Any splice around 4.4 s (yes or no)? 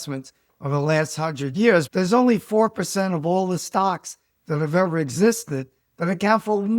no